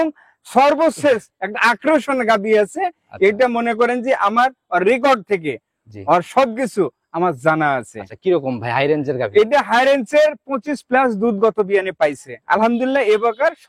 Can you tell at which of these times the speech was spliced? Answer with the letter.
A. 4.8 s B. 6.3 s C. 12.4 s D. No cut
D